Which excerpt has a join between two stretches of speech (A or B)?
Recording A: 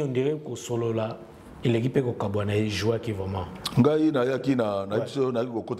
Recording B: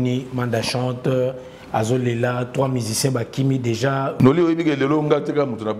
B